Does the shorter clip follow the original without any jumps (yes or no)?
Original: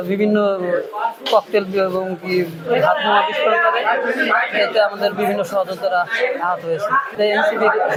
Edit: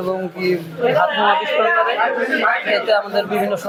yes